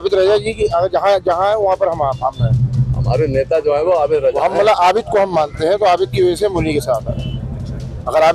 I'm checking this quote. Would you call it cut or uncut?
uncut